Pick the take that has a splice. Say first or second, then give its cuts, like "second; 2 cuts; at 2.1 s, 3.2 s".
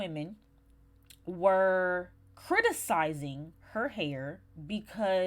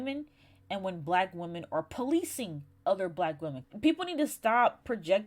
second; 1 cut; at 3.6 s